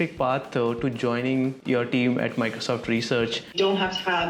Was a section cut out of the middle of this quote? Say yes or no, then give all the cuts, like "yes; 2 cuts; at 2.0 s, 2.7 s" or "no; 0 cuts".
yes; 2 cuts; at 1.6 s, 3.5 s